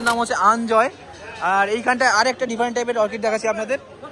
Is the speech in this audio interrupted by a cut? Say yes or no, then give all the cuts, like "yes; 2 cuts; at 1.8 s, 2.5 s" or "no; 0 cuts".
no; 0 cuts